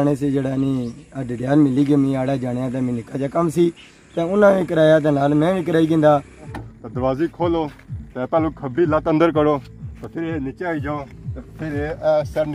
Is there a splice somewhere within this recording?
yes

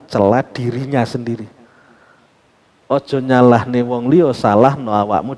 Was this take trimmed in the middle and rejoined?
no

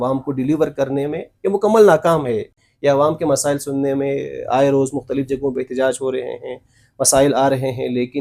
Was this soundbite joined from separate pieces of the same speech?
no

